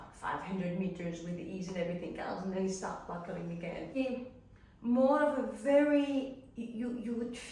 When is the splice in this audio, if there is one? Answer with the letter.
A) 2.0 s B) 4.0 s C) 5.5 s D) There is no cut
B